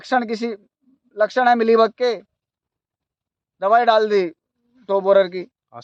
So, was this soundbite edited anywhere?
no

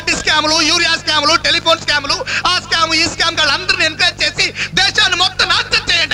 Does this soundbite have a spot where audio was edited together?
no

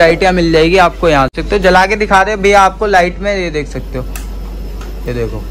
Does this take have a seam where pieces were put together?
yes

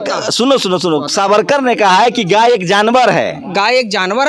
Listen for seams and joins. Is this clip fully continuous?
yes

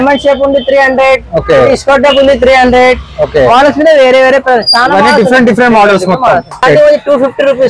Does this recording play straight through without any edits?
no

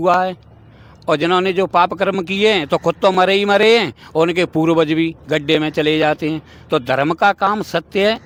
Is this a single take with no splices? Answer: yes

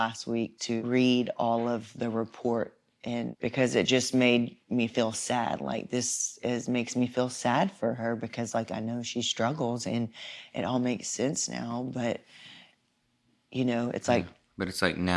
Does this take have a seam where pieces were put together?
yes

